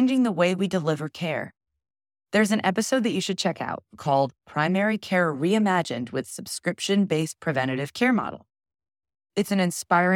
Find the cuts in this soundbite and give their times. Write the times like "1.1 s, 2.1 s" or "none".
none